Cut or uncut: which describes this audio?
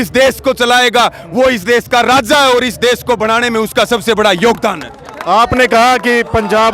uncut